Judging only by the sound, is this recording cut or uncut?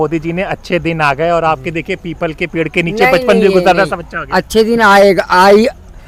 uncut